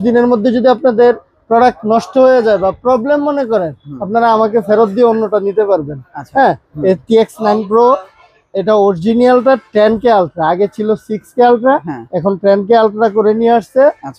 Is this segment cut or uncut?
uncut